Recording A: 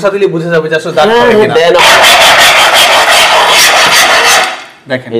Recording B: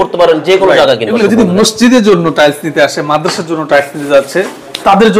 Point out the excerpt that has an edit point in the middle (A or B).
B